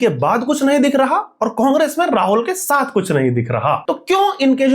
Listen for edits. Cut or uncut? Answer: cut